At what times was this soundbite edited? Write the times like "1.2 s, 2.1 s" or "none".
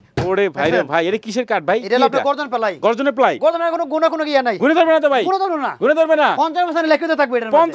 none